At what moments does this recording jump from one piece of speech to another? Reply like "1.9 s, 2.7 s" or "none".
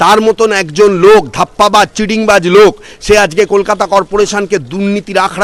none